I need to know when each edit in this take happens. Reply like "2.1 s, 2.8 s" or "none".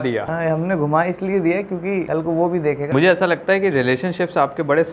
2.9 s